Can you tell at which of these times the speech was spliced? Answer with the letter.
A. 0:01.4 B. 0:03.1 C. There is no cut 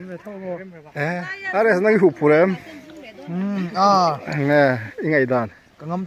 A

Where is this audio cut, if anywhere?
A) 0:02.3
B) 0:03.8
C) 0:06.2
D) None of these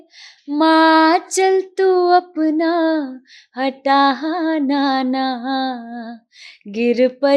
D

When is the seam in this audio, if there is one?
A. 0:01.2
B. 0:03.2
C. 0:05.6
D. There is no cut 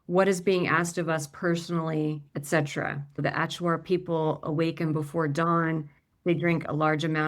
B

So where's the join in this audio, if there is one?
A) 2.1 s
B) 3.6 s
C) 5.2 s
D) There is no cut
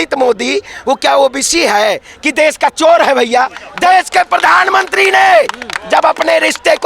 B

